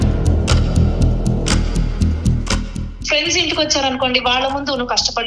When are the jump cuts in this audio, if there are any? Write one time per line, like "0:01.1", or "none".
0:02.9